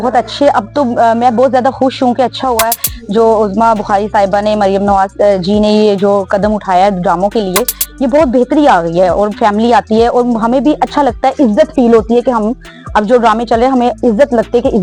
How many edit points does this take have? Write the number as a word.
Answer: zero